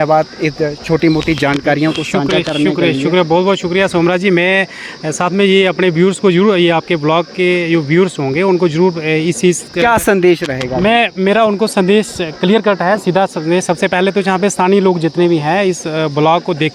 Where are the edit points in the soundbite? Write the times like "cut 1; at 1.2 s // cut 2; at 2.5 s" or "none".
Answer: none